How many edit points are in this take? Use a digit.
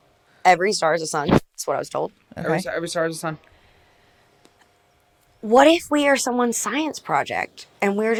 0